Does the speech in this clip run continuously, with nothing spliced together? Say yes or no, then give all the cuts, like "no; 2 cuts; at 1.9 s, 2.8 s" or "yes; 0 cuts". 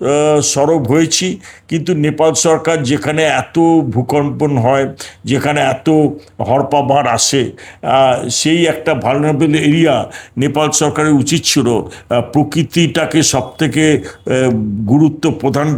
yes; 0 cuts